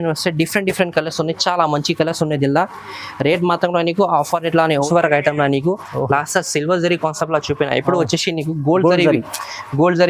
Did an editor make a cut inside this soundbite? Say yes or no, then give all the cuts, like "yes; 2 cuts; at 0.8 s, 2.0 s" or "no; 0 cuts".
yes; 1 cut; at 4.8 s